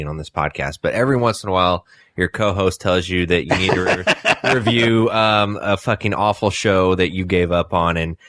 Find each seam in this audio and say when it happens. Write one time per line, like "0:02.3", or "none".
none